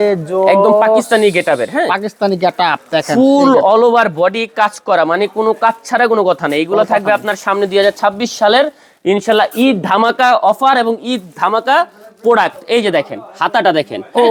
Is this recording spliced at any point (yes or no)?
no